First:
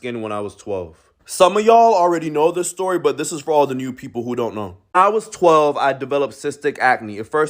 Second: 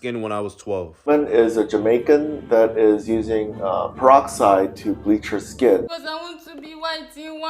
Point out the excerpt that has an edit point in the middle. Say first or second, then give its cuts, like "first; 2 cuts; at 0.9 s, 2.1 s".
second; 2 cuts; at 1.1 s, 5.9 s